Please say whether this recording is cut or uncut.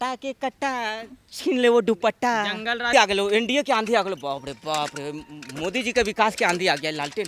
cut